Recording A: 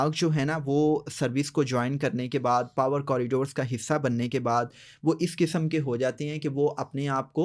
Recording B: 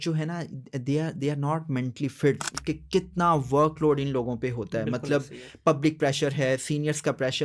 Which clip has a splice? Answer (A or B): B